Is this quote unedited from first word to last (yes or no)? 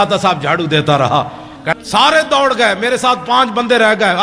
no